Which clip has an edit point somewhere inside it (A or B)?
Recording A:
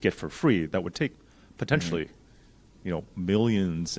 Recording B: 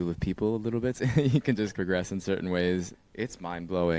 B